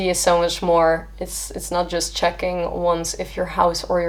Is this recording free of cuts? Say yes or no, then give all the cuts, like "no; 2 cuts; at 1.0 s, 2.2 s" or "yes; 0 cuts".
yes; 0 cuts